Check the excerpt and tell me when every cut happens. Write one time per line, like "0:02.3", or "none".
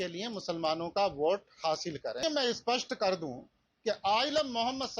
0:02.2